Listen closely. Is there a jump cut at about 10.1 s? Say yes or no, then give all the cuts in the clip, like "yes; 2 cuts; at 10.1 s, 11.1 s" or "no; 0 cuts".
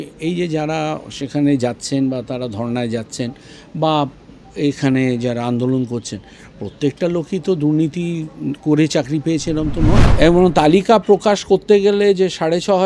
yes; 1 cut; at 10.1 s